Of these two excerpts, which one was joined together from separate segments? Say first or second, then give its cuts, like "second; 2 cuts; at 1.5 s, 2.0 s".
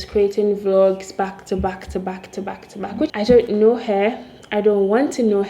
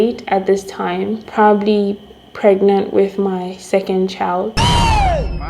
first; 1 cut; at 3.1 s